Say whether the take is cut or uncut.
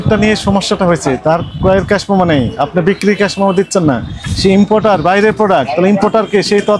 uncut